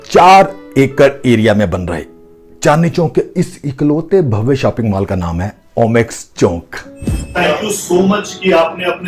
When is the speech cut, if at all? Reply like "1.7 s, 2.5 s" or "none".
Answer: 7.3 s